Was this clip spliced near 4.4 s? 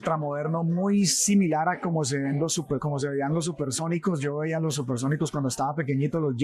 no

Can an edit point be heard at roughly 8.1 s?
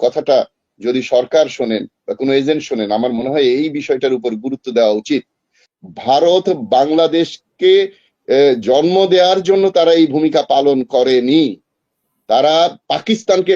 no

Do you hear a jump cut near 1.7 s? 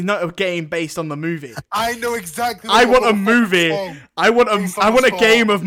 no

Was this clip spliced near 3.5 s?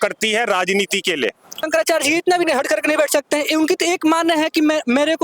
no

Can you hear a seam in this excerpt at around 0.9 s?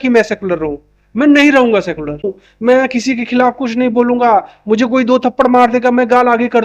no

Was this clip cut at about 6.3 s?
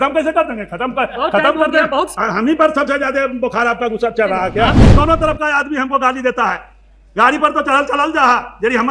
no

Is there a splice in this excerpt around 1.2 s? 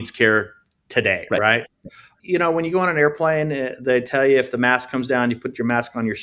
no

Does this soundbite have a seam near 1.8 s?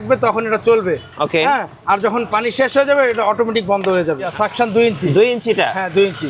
no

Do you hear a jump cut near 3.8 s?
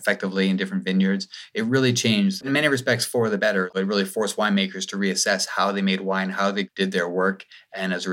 yes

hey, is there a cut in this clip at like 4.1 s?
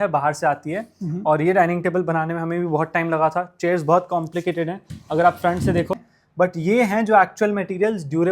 no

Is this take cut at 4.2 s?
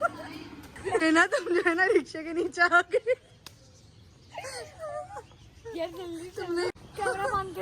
no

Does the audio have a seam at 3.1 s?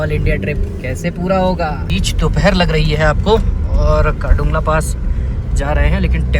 no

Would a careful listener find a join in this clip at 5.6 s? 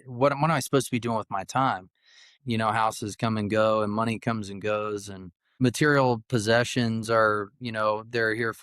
yes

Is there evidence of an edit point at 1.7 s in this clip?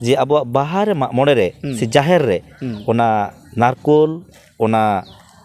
no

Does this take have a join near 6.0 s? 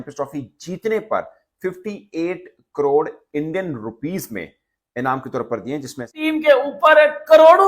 yes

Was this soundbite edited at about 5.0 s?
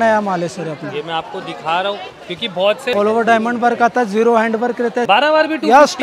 yes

